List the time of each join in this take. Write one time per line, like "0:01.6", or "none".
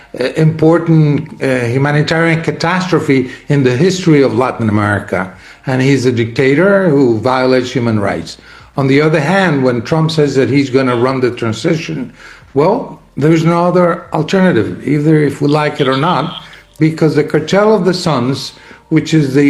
none